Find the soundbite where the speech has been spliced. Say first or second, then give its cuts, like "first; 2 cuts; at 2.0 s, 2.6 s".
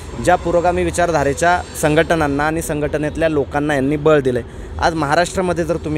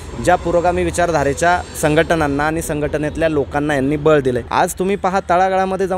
second; 1 cut; at 4.5 s